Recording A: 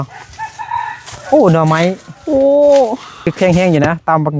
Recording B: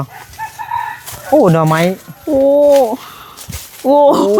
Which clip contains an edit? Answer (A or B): A